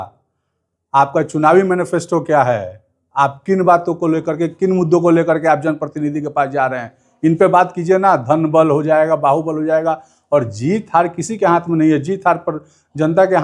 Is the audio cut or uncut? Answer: uncut